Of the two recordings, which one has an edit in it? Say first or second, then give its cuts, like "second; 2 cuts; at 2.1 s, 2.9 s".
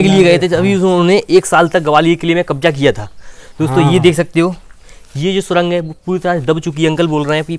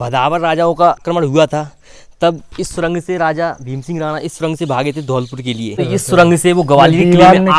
second; 2 cuts; at 1.0 s, 5.8 s